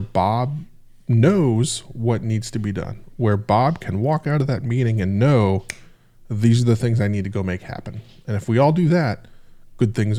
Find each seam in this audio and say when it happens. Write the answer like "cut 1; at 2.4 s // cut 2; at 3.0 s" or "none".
none

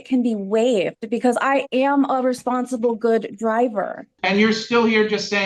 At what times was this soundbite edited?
cut 1; at 4.0 s

